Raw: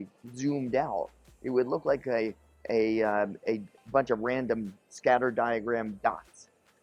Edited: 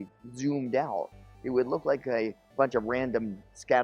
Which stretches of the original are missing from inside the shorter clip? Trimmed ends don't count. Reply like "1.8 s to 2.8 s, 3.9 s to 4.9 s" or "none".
2.4 s to 3.8 s